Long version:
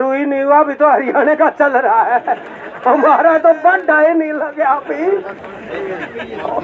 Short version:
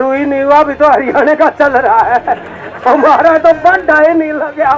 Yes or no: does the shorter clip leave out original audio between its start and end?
no